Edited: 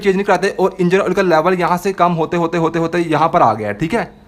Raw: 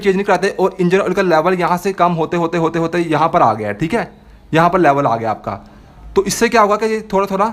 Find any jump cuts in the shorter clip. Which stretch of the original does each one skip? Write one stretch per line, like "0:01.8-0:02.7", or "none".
none